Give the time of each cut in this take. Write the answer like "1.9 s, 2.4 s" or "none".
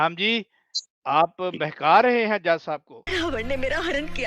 3.0 s